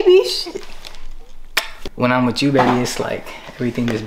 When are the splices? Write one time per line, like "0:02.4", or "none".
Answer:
0:01.8